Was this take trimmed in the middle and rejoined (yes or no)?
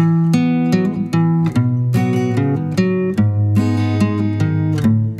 no